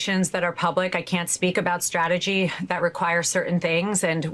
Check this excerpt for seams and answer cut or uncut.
uncut